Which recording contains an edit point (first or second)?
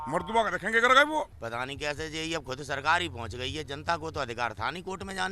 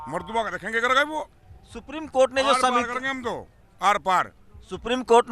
first